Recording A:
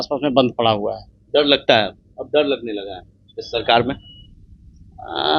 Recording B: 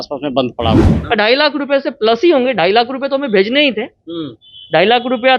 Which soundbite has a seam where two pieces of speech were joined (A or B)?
B